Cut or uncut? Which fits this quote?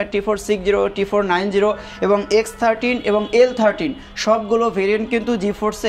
uncut